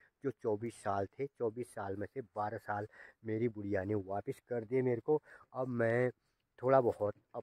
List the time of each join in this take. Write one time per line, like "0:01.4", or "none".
none